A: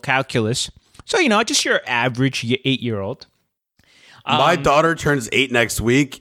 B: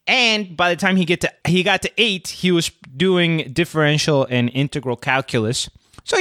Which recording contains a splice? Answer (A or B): B